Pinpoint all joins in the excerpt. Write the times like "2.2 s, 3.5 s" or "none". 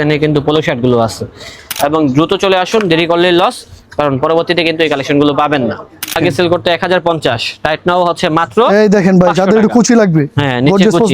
1.6 s, 6.2 s